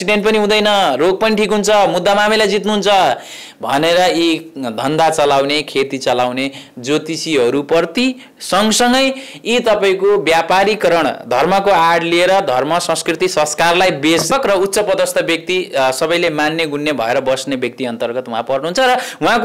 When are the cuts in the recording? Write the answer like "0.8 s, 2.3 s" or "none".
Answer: 14.3 s